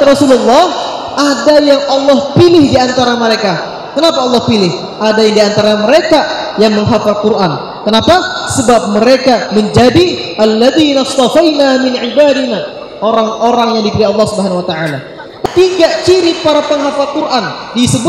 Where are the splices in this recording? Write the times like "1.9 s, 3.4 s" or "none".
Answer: 15.4 s